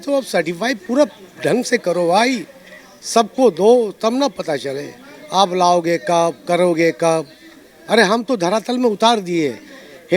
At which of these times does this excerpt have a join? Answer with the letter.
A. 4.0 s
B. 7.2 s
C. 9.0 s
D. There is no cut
D